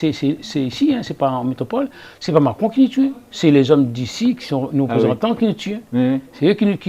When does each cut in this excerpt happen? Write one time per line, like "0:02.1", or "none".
none